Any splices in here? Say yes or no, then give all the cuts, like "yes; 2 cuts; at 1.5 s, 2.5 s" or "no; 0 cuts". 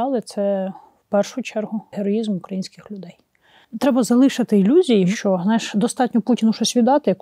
yes; 3 cuts; at 1.9 s, 3.7 s, 5.1 s